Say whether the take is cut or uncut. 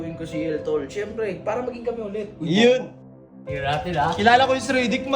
cut